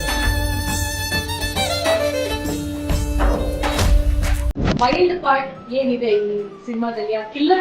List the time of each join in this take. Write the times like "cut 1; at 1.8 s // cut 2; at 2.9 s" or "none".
cut 1; at 4.8 s

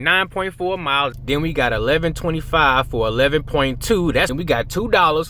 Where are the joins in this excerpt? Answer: cut 1; at 1.2 s // cut 2; at 4.3 s

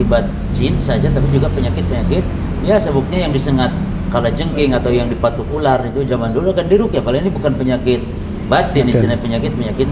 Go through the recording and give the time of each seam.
none

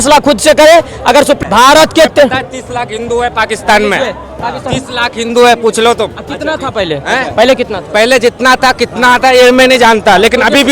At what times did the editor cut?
cut 1; at 1.4 s

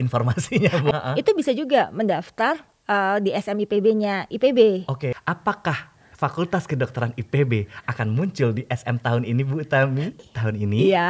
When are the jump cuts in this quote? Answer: cut 1; at 0.9 s // cut 2; at 5.1 s // cut 3; at 10.2 s

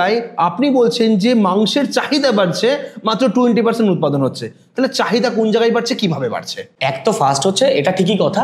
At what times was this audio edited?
none

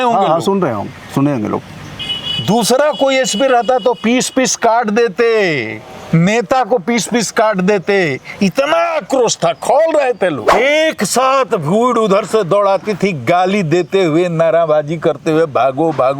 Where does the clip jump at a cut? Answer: cut 1; at 10.5 s

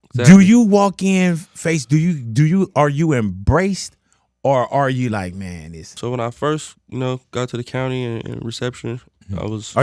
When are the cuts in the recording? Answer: cut 1; at 6.0 s

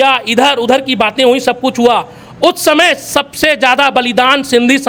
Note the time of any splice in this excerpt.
none

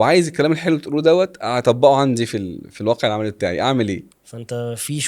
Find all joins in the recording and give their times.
cut 1; at 4.1 s

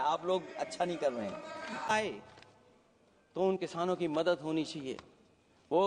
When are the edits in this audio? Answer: cut 1; at 1.9 s

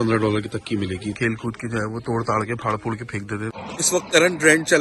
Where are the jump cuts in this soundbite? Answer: cut 1; at 1.2 s // cut 2; at 3.5 s

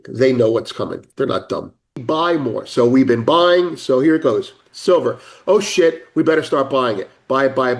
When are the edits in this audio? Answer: cut 1; at 2.0 s

